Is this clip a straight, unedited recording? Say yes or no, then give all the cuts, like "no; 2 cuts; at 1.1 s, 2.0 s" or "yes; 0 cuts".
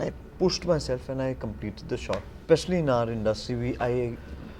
no; 1 cut; at 2.4 s